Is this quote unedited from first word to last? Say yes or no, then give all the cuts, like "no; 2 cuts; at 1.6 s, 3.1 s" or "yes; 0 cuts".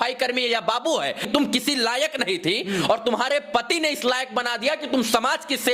no; 1 cut; at 1.2 s